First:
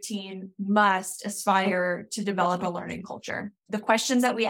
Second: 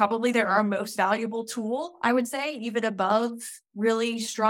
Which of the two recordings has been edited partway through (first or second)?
first